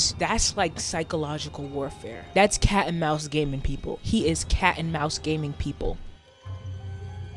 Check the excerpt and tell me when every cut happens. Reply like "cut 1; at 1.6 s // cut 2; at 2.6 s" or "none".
cut 1; at 2.1 s // cut 2; at 6.2 s